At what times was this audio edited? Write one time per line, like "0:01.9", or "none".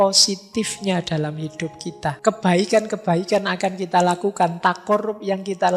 0:02.2